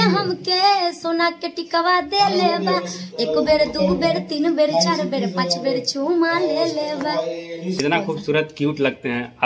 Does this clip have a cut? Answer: yes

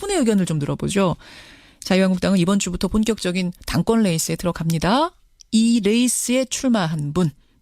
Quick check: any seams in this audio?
no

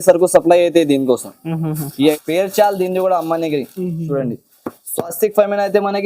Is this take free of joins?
no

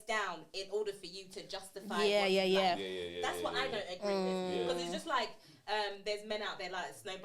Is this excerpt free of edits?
yes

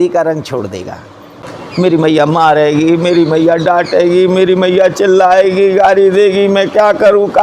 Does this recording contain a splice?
yes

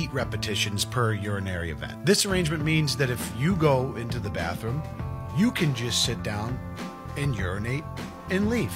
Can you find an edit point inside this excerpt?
no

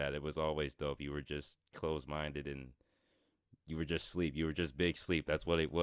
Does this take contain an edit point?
no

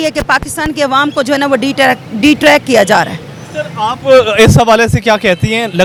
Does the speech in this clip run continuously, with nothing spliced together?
yes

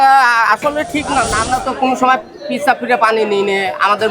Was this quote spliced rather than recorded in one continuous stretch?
yes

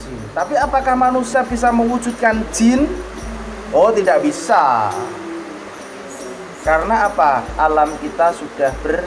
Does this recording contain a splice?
no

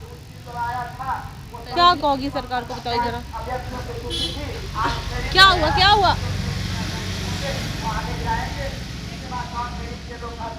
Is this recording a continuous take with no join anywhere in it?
yes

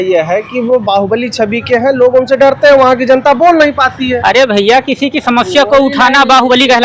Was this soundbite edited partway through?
no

